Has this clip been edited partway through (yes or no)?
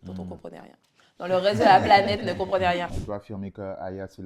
yes